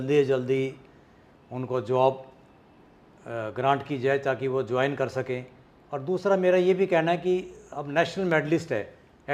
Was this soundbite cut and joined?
no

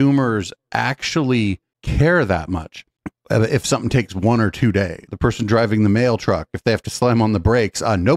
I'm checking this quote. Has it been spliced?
yes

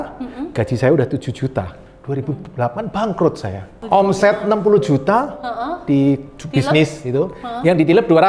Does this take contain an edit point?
yes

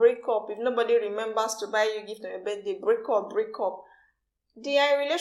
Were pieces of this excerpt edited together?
no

